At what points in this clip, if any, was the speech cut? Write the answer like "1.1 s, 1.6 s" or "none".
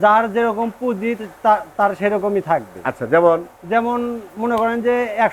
none